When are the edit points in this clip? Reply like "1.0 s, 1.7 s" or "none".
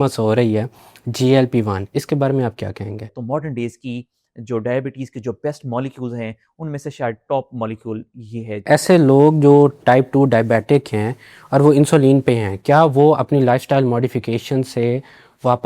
3.1 s, 8.6 s, 9.8 s